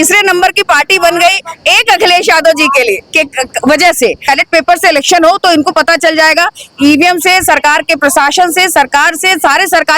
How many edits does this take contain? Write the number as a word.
one